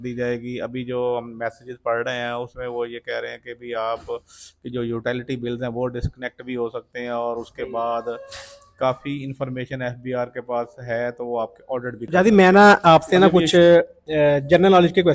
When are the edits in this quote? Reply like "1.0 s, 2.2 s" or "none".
12.0 s